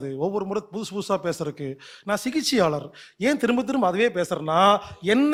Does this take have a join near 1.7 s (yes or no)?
no